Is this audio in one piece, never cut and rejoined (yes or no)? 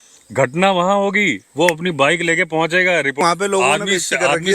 no